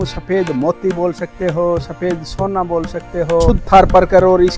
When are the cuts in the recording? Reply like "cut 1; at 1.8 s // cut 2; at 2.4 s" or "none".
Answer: cut 1; at 3.6 s